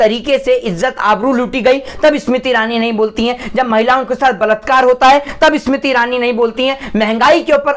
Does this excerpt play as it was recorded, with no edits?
yes; 0 cuts

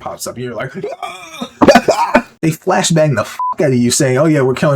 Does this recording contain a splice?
yes; 1 cut; at 2.3 s

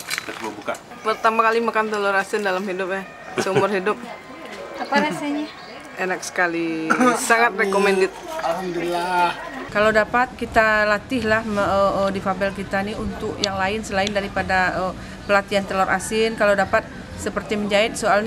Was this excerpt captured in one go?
no; 2 cuts; at 0.9 s, 9.5 s

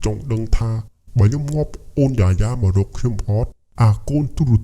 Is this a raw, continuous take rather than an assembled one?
no; 1 cut; at 3.6 s

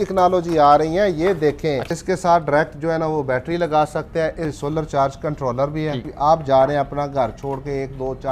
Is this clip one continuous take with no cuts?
no; 3 cuts; at 1.9 s, 4.6 s, 6.1 s

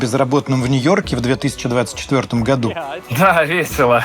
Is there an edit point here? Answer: yes; 1 cut; at 3.0 s

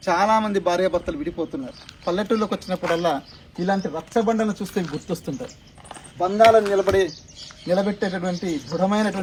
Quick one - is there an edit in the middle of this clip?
no; 0 cuts

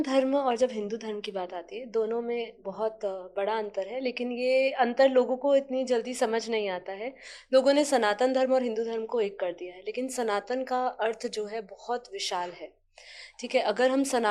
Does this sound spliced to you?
no; 0 cuts

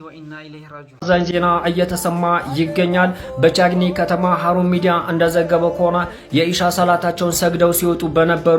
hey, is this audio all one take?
no; 1 cut; at 1.0 s

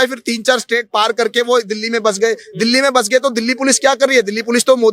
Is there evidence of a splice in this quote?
no; 0 cuts

